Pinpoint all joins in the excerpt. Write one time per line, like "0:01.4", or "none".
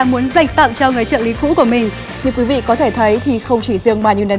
0:02.0